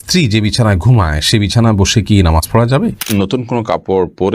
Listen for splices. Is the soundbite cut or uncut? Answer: cut